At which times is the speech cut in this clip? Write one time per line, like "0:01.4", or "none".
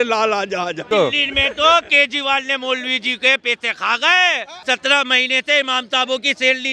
0:00.8
0:04.5